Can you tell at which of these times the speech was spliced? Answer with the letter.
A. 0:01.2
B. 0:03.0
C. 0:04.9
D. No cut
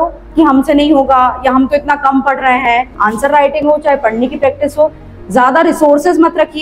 B